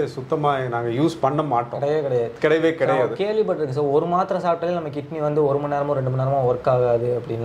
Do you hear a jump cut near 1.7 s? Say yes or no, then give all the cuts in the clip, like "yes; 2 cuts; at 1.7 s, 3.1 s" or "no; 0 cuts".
no; 0 cuts